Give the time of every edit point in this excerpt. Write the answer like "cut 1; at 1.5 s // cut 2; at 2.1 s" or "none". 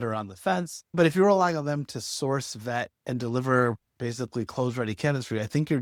none